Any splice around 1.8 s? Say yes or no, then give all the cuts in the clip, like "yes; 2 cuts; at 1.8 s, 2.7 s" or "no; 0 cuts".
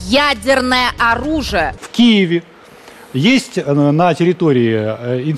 yes; 1 cut; at 1.8 s